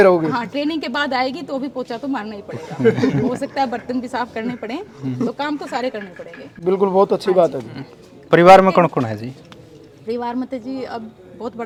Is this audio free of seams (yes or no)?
yes